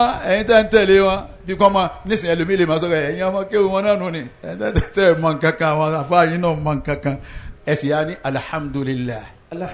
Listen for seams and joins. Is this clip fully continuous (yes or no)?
yes